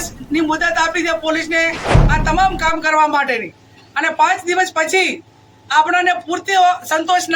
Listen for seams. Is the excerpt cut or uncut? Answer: uncut